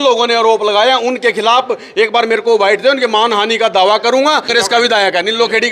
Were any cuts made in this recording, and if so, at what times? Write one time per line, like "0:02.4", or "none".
0:04.4